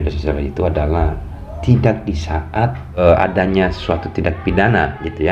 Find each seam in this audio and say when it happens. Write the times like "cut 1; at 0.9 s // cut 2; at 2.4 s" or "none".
cut 1; at 3.0 s